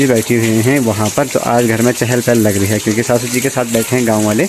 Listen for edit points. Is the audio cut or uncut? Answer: uncut